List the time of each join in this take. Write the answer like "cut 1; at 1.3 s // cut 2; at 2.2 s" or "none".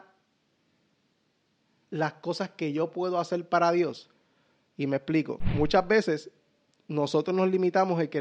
cut 1; at 5.4 s